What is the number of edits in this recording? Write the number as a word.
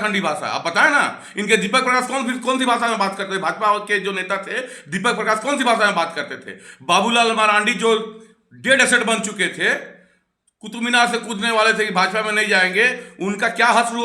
zero